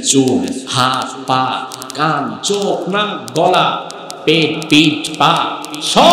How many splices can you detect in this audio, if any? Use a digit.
0